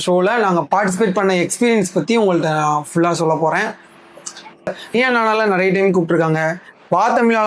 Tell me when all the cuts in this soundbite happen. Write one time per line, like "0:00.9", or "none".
0:04.7